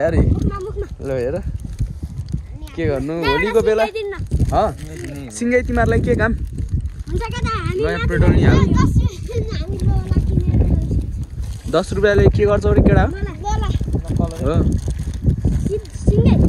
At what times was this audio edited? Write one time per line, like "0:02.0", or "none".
none